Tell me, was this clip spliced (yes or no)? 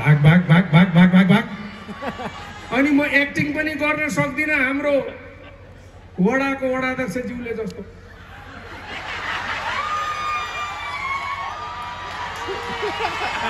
no